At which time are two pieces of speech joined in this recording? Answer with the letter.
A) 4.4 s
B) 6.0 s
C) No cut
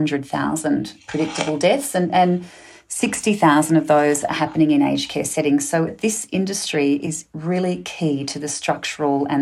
B